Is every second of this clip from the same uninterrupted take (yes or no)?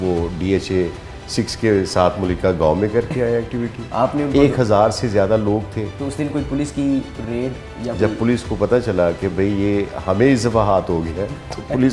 no